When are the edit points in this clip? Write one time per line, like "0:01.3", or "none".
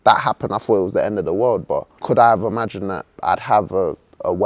0:01.9
0:03.1